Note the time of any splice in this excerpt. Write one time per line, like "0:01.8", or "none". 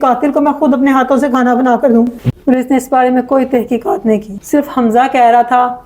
0:02.2

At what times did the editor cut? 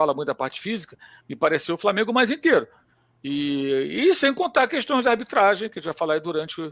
none

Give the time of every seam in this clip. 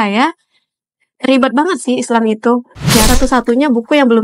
0:03.1

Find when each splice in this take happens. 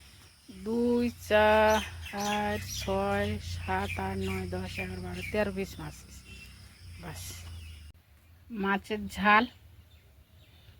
0:07.7

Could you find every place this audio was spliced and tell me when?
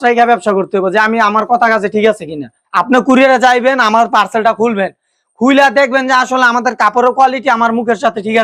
none

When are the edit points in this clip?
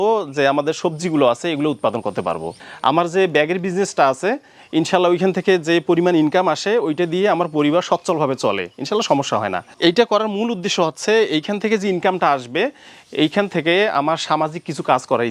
0:02.6
0:09.7

